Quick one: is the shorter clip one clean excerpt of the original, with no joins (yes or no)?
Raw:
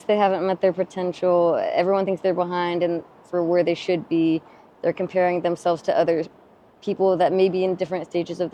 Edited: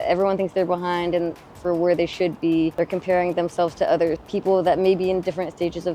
no